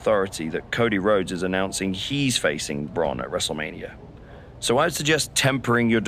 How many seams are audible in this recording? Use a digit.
0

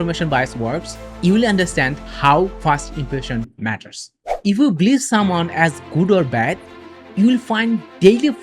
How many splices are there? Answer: 0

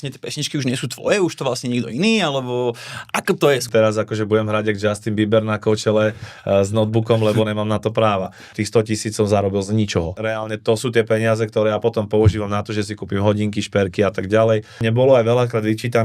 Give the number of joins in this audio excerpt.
4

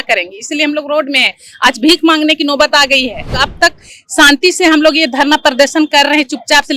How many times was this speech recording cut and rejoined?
1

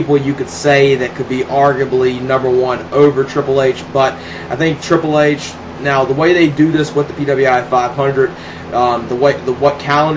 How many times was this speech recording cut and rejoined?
1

